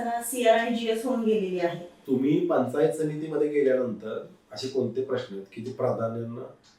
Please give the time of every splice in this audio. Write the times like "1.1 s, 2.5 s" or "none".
1.9 s